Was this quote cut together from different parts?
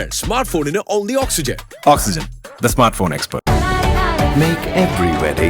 yes; 1 cut; at 3.3 s

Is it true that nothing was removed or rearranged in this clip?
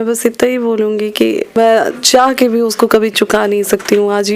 no; 1 cut; at 1.5 s

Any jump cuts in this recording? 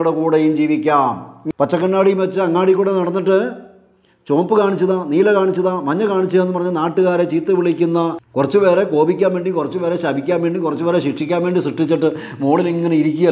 yes; 2 cuts; at 1.3 s, 8.2 s

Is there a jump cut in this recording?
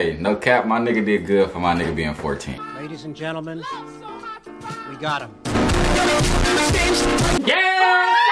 no; 0 cuts

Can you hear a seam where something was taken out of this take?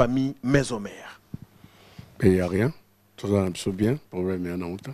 no; 0 cuts

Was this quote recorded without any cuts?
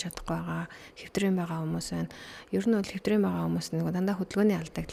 yes; 0 cuts

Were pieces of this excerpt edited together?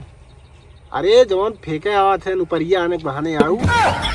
no; 0 cuts

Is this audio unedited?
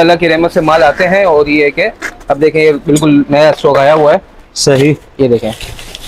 yes; 0 cuts

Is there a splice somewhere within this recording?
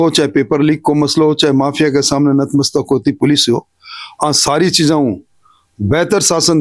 no; 0 cuts

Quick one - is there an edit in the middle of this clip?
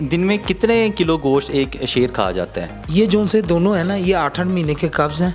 no; 0 cuts

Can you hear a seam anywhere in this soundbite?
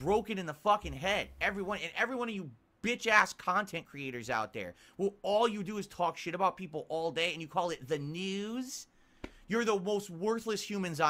no; 0 cuts

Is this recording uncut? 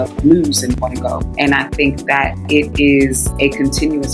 no; 1 cut; at 1.2 s

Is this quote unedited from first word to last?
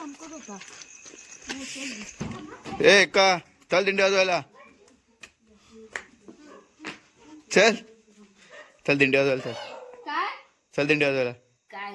yes; 0 cuts

